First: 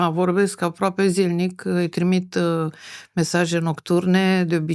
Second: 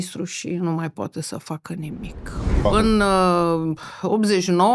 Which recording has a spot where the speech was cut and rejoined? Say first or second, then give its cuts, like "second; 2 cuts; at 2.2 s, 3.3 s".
second; 1 cut; at 2.6 s